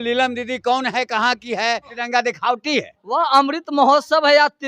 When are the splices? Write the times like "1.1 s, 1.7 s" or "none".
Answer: 2.0 s